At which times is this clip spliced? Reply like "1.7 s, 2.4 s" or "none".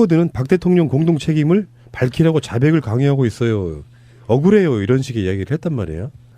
1.9 s